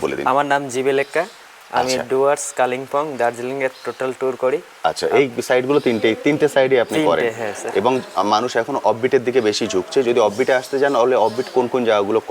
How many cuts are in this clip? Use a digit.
0